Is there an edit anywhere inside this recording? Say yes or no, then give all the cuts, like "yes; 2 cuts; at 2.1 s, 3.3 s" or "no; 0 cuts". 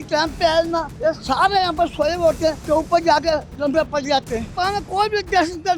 yes; 3 cuts; at 0.9 s, 2.6 s, 4.5 s